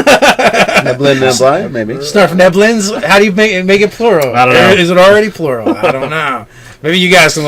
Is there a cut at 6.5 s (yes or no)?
yes